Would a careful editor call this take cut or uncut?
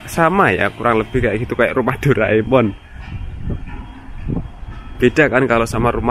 uncut